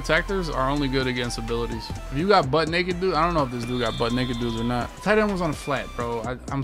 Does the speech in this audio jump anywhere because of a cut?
no; 0 cuts

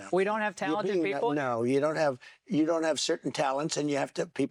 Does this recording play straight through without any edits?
yes; 0 cuts

